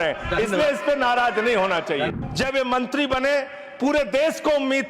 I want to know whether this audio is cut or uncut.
cut